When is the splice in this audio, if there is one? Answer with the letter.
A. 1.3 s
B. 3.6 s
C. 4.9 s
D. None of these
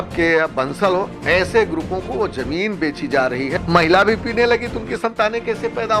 B